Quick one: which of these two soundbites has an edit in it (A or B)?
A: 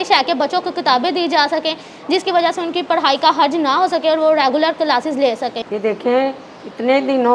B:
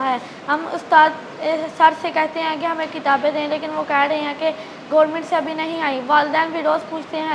A